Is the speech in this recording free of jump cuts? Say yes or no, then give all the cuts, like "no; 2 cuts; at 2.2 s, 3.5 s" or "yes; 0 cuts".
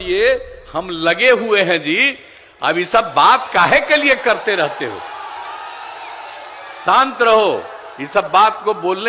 yes; 0 cuts